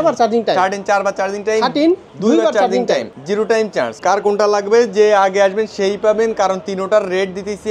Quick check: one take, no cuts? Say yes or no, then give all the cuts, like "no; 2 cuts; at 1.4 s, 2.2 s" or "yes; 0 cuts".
no; 2 cuts; at 2.1 s, 3.9 s